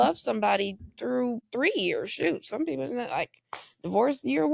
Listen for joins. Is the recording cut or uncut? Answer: cut